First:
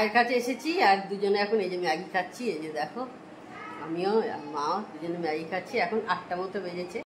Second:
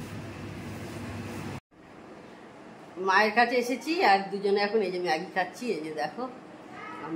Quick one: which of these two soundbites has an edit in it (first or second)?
second